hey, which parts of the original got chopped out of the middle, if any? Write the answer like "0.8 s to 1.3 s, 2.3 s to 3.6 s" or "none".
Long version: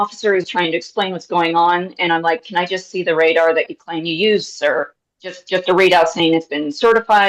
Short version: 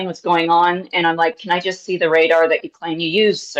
none